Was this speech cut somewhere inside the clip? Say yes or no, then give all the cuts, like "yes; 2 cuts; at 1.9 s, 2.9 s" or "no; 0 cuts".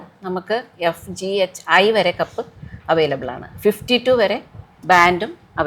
no; 0 cuts